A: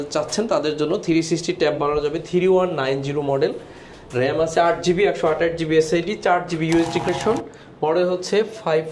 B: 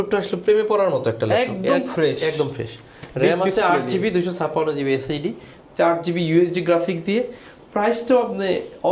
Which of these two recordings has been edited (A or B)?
A